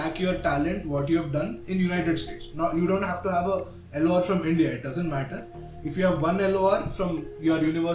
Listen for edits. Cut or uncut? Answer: uncut